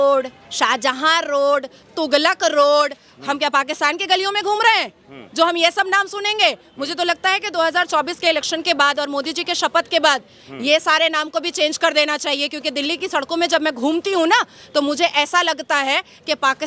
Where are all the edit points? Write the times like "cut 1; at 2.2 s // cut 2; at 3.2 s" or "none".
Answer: none